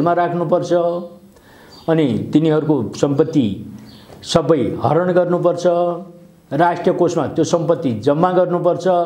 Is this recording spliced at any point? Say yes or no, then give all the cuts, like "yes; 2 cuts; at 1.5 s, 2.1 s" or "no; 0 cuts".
no; 0 cuts